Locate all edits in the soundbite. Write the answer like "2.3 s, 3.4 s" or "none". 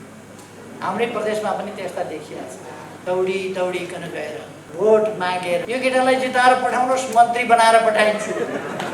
2.9 s, 4.6 s, 5.6 s